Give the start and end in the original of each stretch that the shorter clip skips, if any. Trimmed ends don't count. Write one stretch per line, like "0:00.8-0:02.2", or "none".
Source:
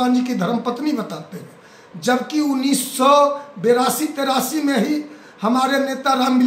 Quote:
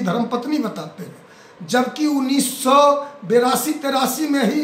none